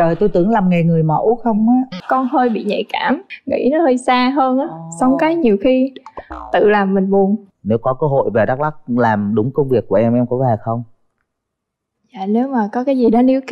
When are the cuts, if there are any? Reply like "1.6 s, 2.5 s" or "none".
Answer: 1.9 s, 3.3 s, 7.5 s